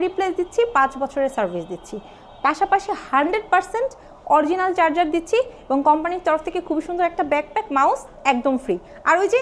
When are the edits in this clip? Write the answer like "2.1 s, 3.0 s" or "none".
none